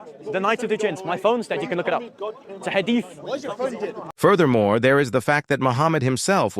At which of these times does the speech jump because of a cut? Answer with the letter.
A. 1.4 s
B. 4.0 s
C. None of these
B